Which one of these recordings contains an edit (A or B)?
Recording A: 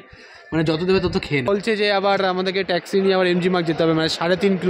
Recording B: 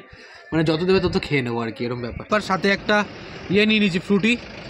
A